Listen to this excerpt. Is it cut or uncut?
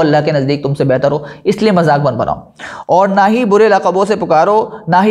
uncut